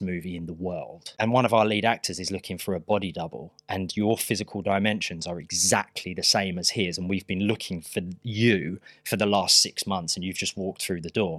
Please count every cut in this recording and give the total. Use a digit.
1